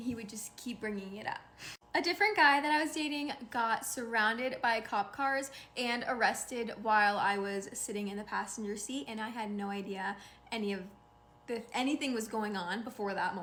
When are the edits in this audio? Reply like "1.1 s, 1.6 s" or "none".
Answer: none